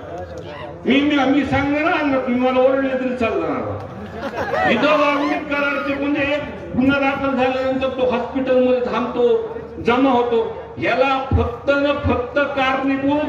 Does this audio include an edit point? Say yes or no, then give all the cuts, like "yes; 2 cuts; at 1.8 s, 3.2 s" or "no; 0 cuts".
no; 0 cuts